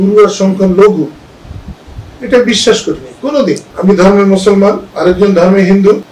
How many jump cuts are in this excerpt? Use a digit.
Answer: 0